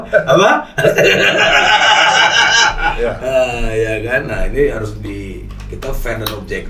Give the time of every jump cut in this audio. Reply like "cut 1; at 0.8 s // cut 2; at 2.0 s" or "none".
none